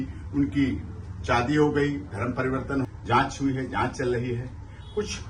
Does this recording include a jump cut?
yes; 1 cut; at 2.9 s

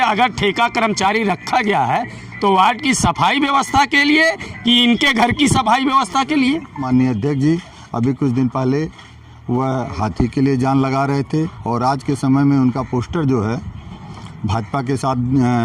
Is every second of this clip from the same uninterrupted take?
no; 1 cut; at 6.9 s

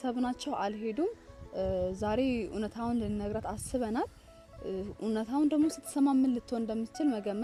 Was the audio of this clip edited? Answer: no; 0 cuts

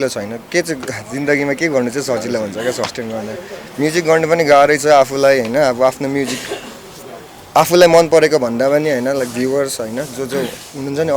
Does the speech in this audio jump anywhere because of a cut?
no; 0 cuts

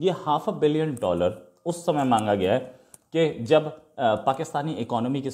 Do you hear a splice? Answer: no; 0 cuts

